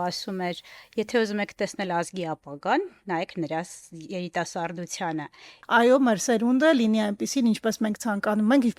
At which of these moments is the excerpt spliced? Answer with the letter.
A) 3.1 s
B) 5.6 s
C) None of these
B